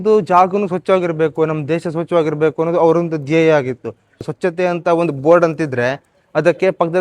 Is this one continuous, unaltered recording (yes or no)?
no